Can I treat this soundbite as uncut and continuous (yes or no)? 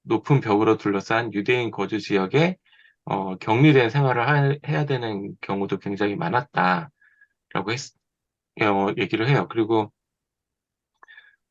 yes